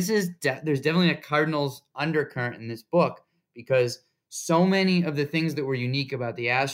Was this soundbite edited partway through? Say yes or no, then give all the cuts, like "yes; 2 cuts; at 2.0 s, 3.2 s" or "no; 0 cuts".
no; 0 cuts